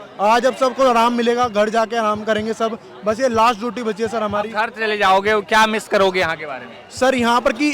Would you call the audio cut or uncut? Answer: uncut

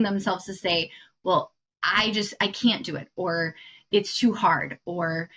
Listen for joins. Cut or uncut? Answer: uncut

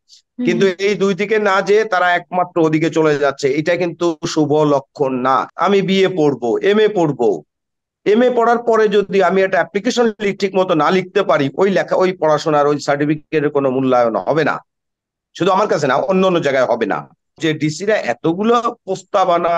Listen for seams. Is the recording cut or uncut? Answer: cut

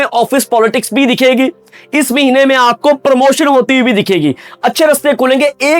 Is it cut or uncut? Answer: cut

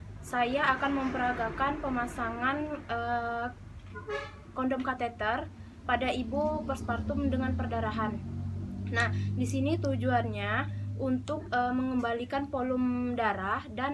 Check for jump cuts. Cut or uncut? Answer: uncut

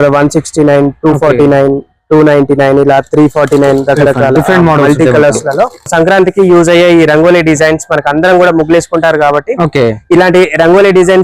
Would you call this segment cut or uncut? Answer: cut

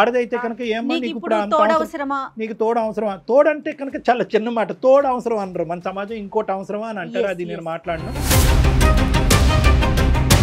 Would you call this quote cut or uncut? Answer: uncut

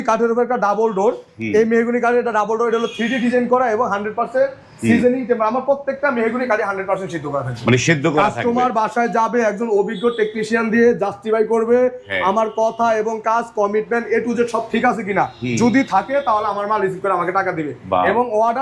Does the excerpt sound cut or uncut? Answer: uncut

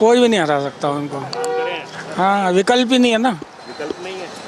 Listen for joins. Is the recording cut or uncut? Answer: uncut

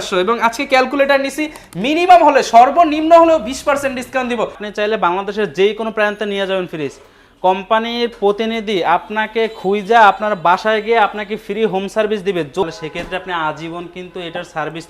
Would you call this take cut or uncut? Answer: cut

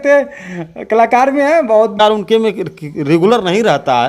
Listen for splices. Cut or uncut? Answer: cut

